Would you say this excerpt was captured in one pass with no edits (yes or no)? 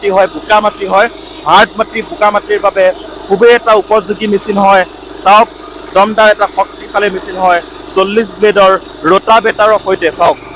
yes